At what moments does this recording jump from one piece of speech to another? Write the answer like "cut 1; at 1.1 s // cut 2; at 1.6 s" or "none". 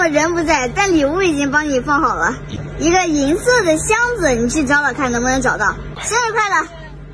cut 1; at 5.9 s